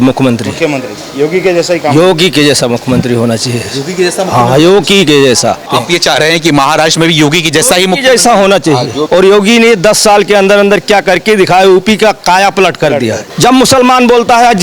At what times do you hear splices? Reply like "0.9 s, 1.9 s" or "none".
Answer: 5.7 s, 9.0 s, 13.3 s